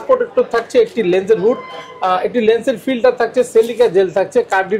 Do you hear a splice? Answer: no; 0 cuts

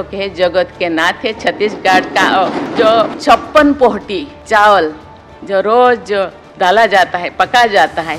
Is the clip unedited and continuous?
no; 3 cuts; at 2.7 s, 4.3 s, 6.4 s

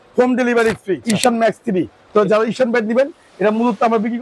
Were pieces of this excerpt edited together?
yes; 2 cuts; at 1.0 s, 2.0 s

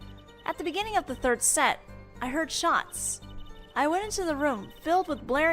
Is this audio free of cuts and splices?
no; 1 cut; at 4.1 s

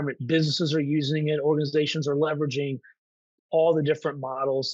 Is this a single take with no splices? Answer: yes; 0 cuts

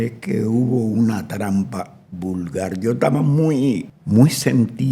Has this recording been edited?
yes; 1 cut; at 3.9 s

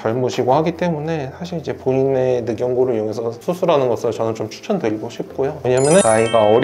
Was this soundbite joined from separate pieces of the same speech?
no; 0 cuts

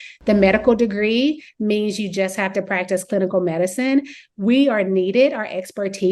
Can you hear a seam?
no; 0 cuts

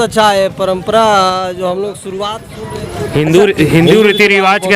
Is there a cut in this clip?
yes; 1 cut; at 2.8 s

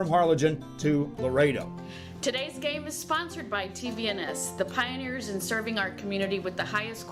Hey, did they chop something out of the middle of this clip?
no; 0 cuts

